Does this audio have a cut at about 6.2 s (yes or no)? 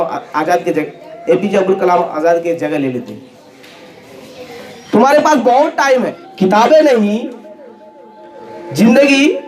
yes